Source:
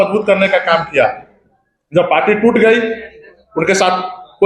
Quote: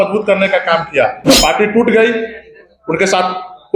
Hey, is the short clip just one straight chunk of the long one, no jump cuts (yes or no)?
no